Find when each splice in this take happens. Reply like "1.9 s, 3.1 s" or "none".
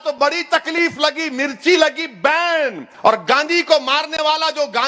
2.8 s